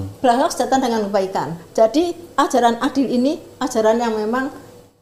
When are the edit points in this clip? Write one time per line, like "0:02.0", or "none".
none